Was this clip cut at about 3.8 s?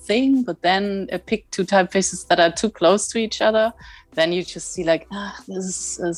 no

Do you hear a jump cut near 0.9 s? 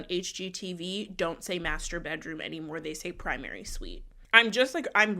no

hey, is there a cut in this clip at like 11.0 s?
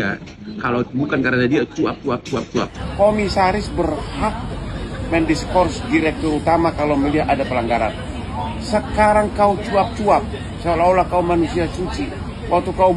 no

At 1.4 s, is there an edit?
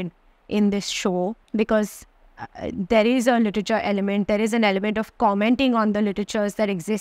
yes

